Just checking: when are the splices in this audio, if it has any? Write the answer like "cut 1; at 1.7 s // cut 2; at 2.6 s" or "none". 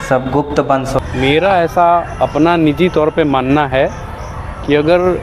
cut 1; at 1.0 s